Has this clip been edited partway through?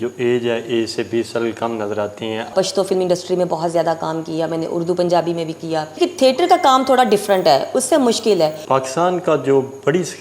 yes; 3 cuts; at 2.5 s, 6.0 s, 8.6 s

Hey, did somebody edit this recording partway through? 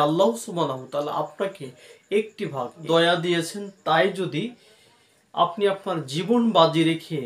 yes; 1 cut; at 2.8 s

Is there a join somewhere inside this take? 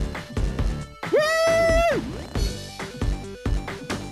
no; 0 cuts

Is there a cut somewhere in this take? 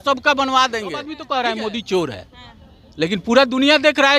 yes; 1 cut; at 1.1 s

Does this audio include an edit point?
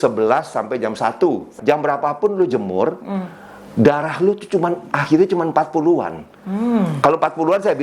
yes; 1 cut; at 1.6 s

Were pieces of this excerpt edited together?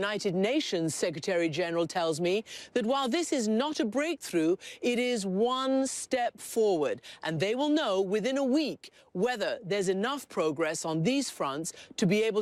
no; 0 cuts

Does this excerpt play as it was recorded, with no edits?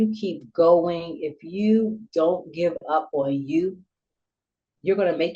yes; 0 cuts

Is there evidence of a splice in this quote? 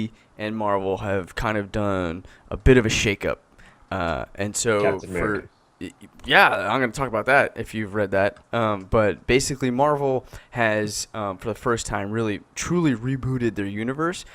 yes; 1 cut; at 13.1 s

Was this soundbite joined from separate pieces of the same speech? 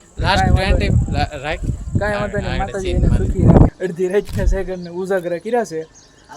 yes; 1 cut; at 3.7 s

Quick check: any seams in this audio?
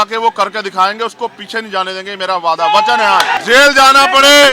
yes; 1 cut; at 3.3 s

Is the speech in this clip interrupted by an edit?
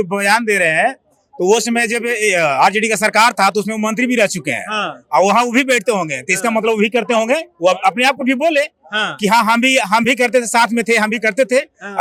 no; 0 cuts

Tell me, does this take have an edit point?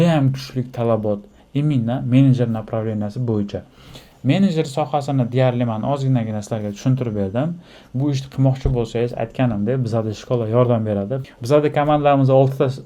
no; 0 cuts

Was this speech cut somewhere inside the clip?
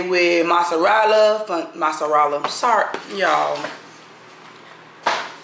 no; 0 cuts

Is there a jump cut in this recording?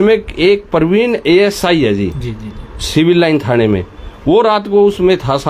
no; 0 cuts

